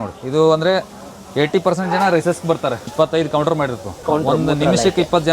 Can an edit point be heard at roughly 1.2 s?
no; 2 cuts; at 2.9 s, 4.0 s

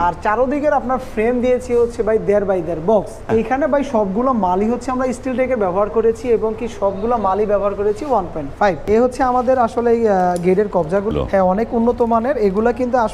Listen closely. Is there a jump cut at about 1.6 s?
no; 3 cuts; at 3.2 s, 8.8 s, 11.1 s

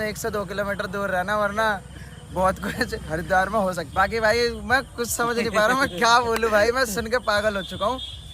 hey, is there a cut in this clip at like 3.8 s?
yes; 1 cut; at 3.8 s

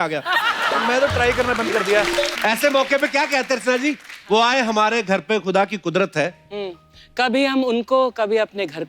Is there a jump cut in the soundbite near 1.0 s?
no; 1 cut; at 2.3 s

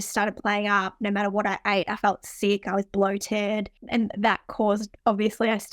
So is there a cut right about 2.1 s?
no; 1 cut; at 3.8 s

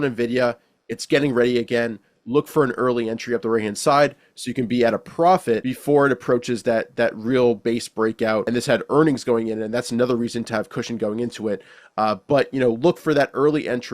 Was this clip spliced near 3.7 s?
no; 2 cuts; at 5.7 s, 8.5 s

